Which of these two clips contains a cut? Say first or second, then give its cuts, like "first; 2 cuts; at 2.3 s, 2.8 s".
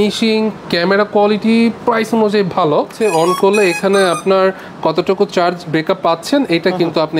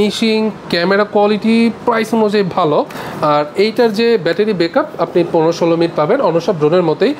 first; 1 cut; at 2.9 s